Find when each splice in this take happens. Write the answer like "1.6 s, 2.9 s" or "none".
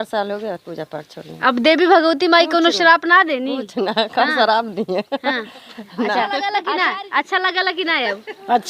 6.6 s